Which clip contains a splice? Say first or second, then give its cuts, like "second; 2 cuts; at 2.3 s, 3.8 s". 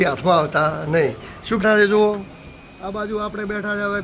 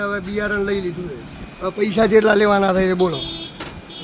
first; 1 cut; at 1.6 s